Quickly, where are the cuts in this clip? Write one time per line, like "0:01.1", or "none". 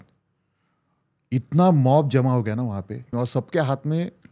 0:03.1